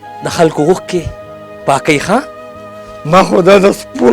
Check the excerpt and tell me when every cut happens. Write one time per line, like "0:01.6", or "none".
0:03.0